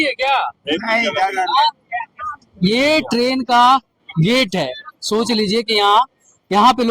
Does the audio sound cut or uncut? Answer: uncut